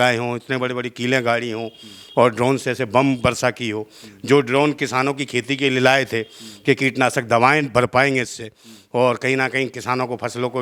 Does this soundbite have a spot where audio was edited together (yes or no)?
no